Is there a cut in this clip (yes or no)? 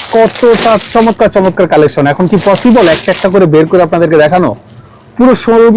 no